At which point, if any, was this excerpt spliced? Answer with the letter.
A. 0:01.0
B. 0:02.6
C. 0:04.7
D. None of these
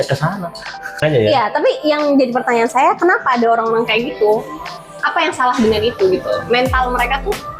A